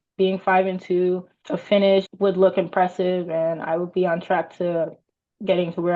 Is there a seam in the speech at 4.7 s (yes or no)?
no